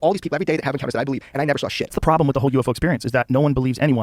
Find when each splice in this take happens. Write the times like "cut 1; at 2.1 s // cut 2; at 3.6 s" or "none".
cut 1; at 1.9 s